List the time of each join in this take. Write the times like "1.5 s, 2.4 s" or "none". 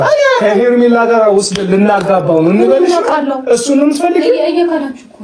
none